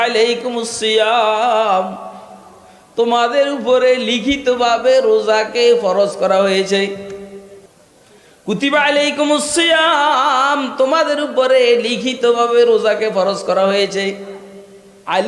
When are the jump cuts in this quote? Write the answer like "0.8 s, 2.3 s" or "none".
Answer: none